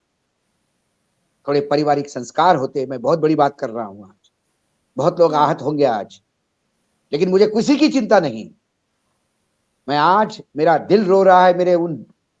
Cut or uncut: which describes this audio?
uncut